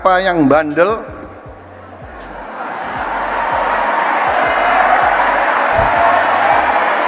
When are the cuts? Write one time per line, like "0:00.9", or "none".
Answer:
none

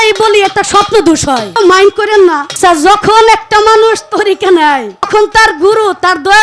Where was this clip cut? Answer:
0:01.6
0:02.5
0:05.1

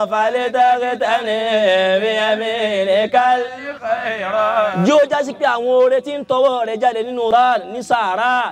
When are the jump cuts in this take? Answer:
0:07.3

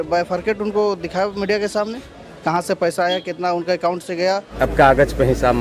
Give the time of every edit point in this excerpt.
0:04.5

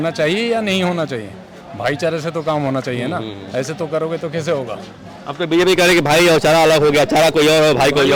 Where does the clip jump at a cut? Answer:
none

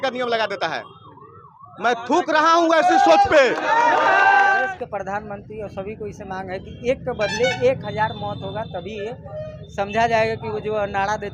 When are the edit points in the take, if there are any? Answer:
0:04.6

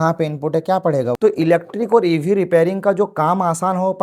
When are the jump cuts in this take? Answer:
0:01.1

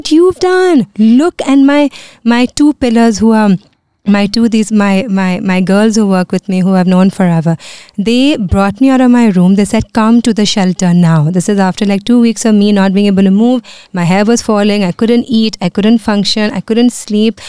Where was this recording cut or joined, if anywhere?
none

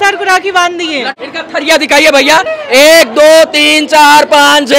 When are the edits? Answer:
0:01.1

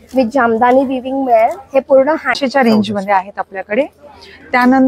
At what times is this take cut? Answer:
0:02.4

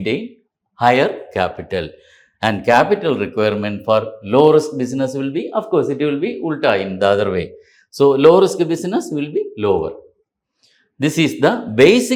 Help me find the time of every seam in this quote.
none

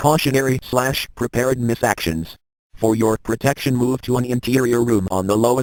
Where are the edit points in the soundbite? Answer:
none

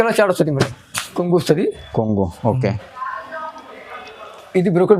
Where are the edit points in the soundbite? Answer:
0:01.1

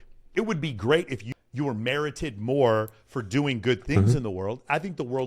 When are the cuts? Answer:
0:01.3

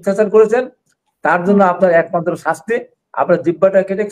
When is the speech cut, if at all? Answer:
none

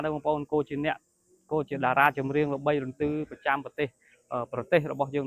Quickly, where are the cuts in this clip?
none

